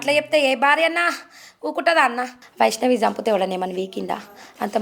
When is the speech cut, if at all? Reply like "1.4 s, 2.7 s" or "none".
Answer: 2.4 s